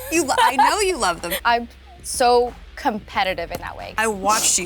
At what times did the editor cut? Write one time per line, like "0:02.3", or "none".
0:01.3